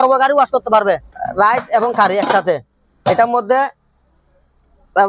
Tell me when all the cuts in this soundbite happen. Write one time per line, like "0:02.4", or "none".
0:01.2